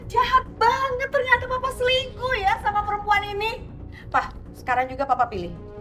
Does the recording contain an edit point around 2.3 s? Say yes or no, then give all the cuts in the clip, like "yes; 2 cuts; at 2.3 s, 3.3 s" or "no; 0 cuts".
no; 0 cuts